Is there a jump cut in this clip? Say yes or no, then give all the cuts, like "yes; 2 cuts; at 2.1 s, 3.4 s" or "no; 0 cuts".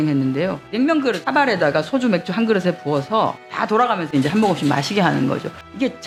no; 0 cuts